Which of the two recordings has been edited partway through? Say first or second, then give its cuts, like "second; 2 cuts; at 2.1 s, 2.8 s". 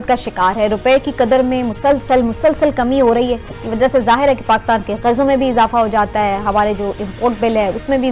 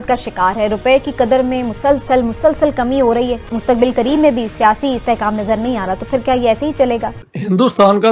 second; 2 cuts; at 3.5 s, 7.2 s